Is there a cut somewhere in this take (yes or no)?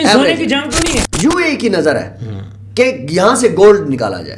yes